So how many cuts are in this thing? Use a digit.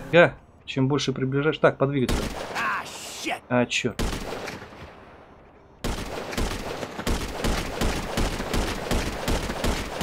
1